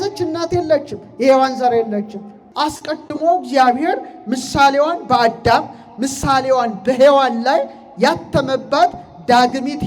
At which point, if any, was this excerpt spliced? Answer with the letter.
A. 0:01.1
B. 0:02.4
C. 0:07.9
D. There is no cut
B